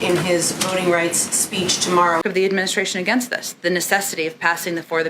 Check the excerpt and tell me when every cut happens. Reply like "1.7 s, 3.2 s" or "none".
2.2 s